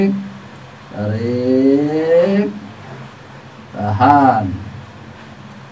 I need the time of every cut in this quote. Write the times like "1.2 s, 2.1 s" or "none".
none